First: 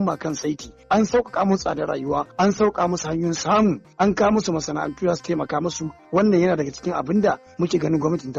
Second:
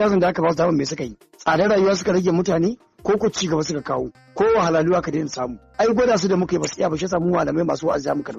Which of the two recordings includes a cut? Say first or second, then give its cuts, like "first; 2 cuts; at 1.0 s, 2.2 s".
first; 4 cuts; at 2.3 s, 3.8 s, 5.9 s, 7.5 s